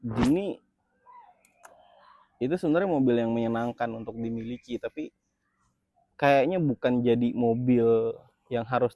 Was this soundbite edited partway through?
no; 0 cuts

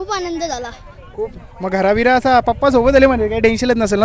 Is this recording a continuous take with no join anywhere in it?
yes; 0 cuts

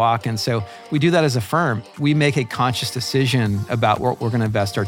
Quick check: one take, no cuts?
no; 1 cut; at 1.9 s

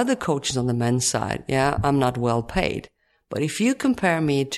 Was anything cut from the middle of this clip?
no; 0 cuts

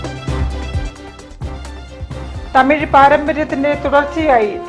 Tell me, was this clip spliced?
no; 0 cuts

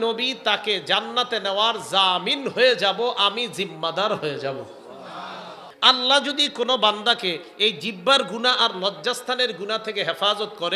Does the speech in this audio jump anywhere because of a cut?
yes; 1 cut; at 5.6 s

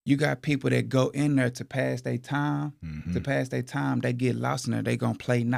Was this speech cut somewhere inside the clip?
no; 0 cuts

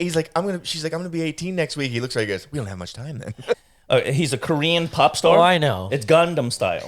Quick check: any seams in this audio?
yes; 1 cut; at 3.5 s

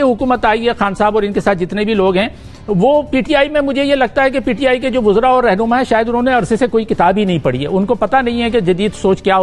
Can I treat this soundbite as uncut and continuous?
yes; 0 cuts

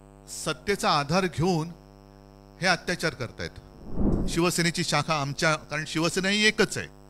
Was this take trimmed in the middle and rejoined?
yes; 1 cut; at 4.1 s

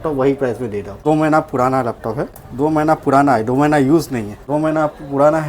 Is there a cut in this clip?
yes; 3 cuts; at 1.0 s, 2.4 s, 4.4 s

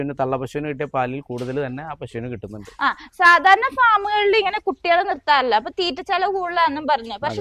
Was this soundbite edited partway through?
no; 0 cuts

